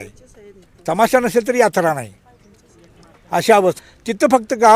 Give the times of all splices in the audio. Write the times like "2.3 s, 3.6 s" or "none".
3.8 s